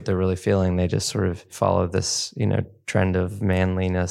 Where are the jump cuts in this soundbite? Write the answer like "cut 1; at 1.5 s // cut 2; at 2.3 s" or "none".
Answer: cut 1; at 1.5 s